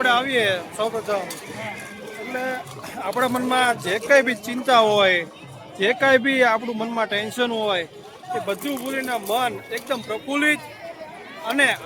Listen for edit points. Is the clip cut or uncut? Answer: uncut